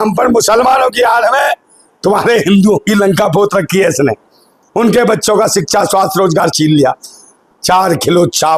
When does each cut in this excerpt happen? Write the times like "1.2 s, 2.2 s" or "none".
none